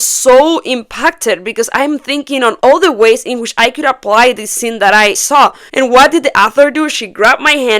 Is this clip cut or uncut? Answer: cut